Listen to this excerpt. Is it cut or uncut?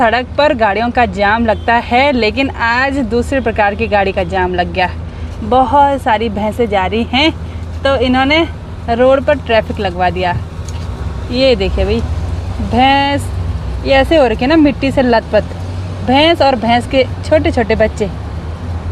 uncut